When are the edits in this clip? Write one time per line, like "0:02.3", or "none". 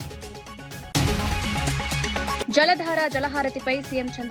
0:00.9
0:02.4